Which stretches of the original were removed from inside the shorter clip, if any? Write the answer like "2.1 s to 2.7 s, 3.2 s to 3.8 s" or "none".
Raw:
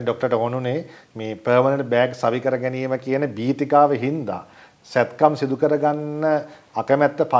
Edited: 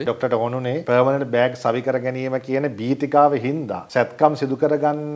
0.8 s to 1.4 s, 4.3 s to 4.7 s